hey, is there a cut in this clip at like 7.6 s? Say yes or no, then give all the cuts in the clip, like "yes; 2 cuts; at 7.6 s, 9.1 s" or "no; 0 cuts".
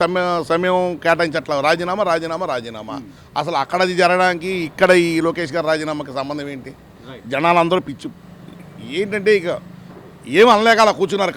no; 0 cuts